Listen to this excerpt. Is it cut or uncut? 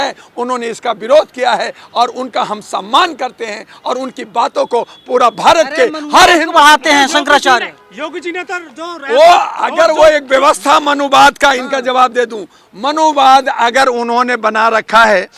uncut